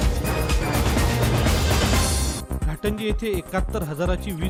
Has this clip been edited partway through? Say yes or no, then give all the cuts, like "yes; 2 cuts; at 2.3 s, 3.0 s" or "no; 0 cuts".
no; 0 cuts